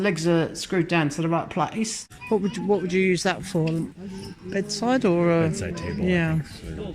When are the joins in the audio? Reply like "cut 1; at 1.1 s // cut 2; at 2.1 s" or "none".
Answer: cut 1; at 2.1 s